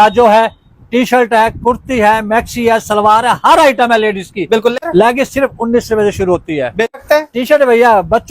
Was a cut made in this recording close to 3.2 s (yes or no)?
no